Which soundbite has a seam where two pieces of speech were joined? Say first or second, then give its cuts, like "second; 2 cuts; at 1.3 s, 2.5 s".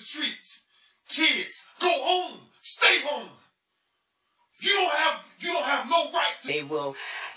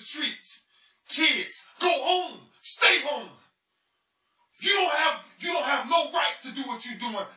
second; 1 cut; at 6.4 s